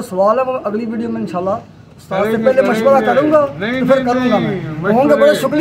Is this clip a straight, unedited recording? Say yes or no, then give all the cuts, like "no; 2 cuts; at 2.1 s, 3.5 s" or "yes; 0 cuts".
yes; 0 cuts